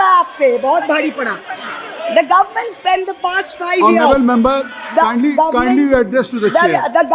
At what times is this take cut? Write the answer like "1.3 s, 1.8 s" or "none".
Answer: none

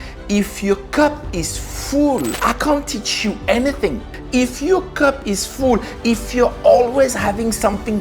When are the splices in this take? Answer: 2.4 s, 4.2 s

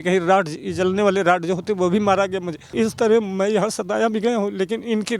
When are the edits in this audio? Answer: 2.6 s

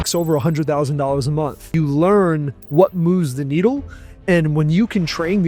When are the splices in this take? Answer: 1.7 s

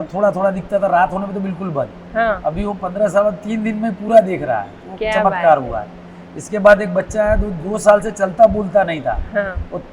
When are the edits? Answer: none

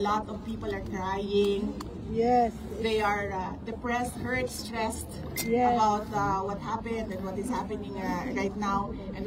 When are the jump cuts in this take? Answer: none

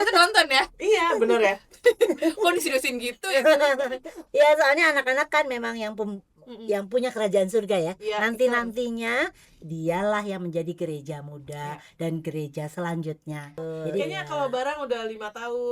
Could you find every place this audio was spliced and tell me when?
14.0 s

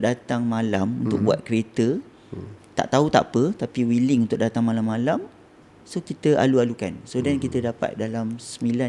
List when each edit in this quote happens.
none

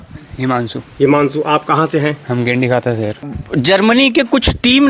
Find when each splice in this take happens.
3.2 s

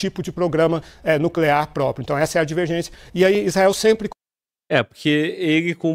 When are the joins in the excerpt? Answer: none

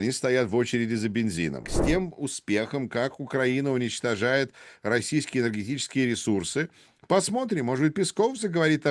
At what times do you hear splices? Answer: 1.7 s

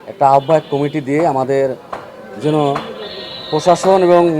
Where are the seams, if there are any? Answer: none

